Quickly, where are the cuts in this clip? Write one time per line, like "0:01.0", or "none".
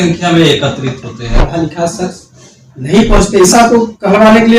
0:01.4
0:03.5